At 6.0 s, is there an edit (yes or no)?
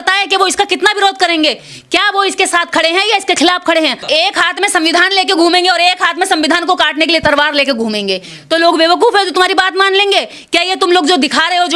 no